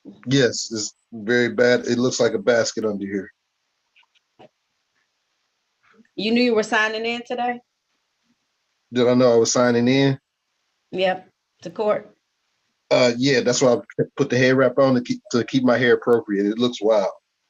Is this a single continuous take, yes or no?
yes